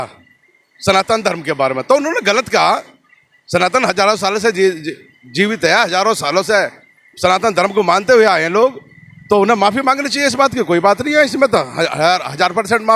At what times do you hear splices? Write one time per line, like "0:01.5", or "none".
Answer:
none